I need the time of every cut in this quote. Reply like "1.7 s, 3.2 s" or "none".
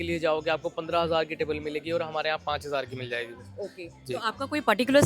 none